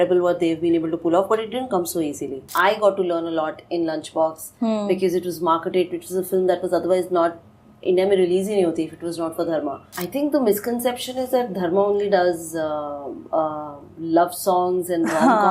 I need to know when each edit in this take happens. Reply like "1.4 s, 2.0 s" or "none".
2.4 s, 9.9 s